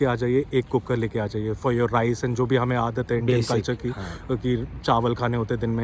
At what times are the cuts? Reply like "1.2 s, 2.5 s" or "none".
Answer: none